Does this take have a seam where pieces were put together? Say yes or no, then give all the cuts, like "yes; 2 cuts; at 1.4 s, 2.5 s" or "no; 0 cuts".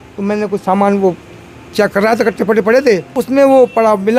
yes; 1 cut; at 3.1 s